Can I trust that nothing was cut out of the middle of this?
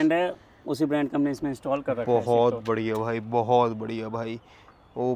yes; 0 cuts

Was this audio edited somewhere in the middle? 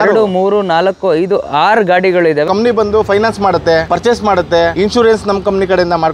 yes; 3 cuts; at 2.5 s, 3.9 s, 4.7 s

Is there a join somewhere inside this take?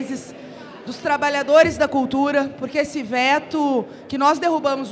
no; 0 cuts

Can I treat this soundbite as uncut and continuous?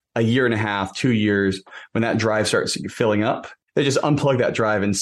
no; 1 cut; at 3.5 s

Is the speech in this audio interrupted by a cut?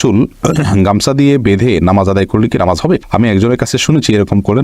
no; 0 cuts

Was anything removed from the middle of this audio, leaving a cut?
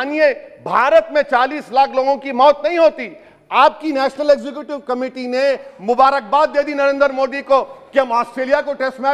no; 0 cuts

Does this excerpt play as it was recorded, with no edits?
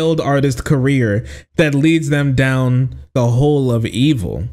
no; 1 cut; at 3.1 s

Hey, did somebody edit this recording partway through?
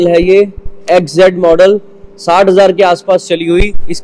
no; 0 cuts

